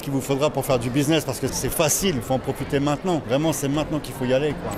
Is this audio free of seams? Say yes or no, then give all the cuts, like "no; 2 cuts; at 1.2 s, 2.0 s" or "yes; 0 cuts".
no; 2 cuts; at 1.5 s, 3.2 s